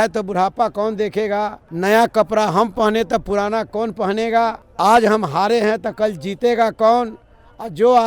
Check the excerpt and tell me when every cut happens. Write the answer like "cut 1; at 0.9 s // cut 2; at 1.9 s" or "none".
cut 1; at 1.6 s // cut 2; at 4.6 s